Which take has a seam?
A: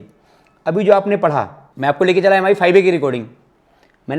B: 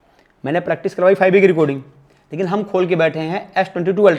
A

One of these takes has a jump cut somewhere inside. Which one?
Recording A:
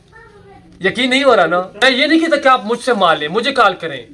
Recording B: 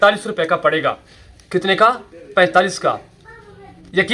A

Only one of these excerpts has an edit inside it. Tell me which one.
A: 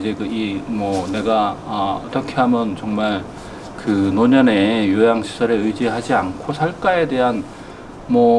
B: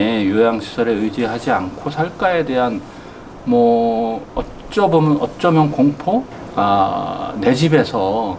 B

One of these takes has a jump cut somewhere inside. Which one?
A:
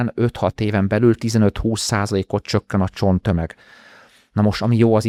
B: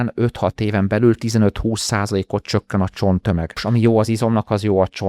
B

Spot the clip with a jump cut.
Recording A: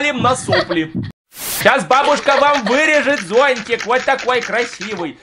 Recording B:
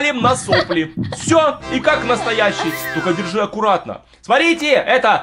A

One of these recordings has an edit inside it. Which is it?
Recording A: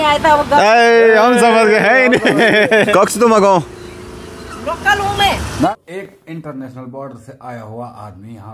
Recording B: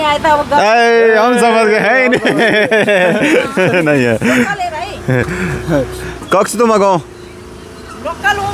A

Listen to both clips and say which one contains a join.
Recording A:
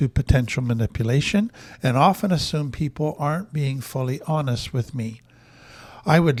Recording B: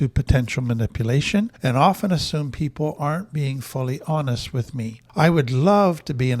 B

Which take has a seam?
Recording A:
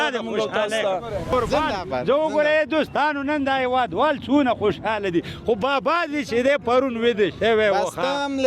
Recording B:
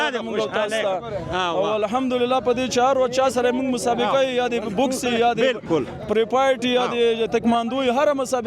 A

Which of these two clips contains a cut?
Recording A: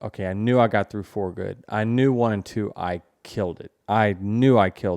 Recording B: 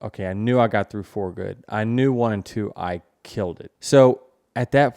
B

